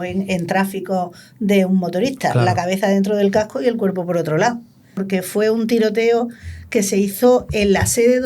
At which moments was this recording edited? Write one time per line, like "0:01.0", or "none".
0:05.0